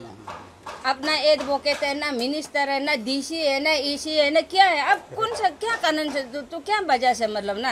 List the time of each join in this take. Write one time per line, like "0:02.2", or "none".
none